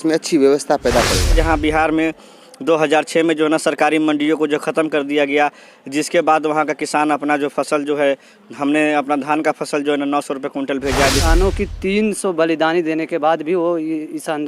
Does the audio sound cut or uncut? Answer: cut